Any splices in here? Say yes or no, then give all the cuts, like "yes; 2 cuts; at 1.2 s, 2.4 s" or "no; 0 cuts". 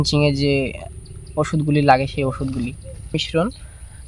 yes; 1 cut; at 3.1 s